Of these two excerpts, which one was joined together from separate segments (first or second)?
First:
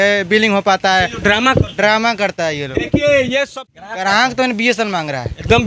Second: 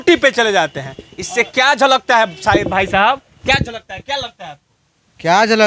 first